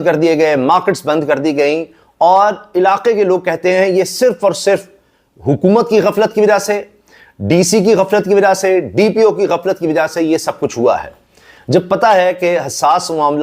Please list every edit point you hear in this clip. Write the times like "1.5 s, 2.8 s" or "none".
none